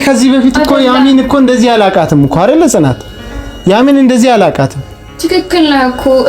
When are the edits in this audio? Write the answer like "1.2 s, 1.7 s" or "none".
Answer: none